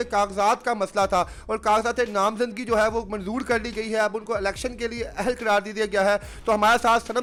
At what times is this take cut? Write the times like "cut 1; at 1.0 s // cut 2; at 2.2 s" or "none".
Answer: none

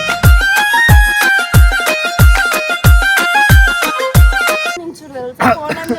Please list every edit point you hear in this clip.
cut 1; at 4.8 s

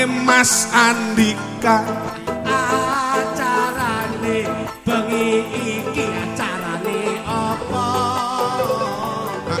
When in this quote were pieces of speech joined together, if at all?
cut 1; at 2.2 s

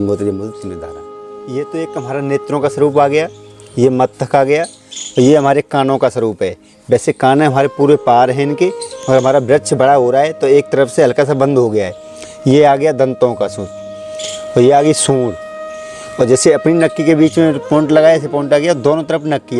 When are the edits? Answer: cut 1; at 1.0 s

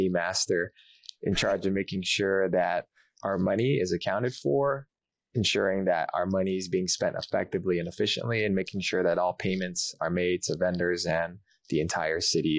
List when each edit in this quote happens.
none

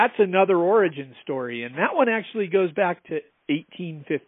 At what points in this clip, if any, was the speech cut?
none

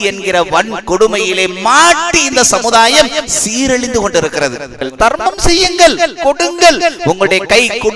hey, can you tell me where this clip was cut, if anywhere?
cut 1; at 4.8 s

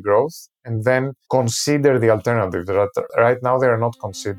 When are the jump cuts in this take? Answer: cut 1; at 3.1 s

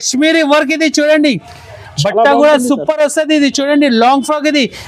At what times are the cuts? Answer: none

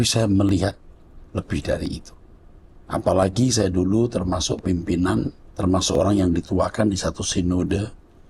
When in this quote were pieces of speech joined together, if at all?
cut 1; at 5.4 s

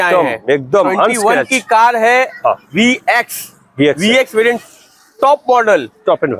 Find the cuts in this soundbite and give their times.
none

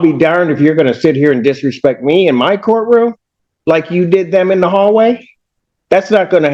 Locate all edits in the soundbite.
none

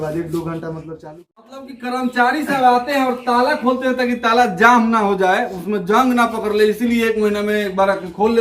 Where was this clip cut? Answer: cut 1; at 1.7 s

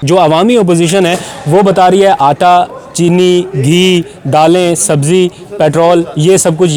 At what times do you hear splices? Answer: none

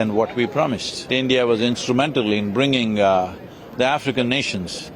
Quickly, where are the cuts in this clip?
cut 1; at 1.1 s

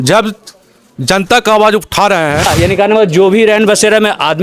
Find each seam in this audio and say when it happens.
cut 1; at 2.5 s

